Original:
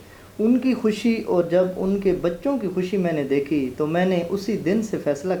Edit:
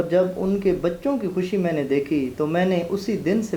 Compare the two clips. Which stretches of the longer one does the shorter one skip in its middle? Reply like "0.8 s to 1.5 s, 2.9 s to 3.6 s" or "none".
none